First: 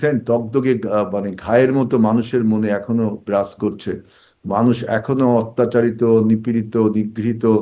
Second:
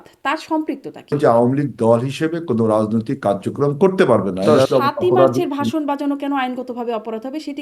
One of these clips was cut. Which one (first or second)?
second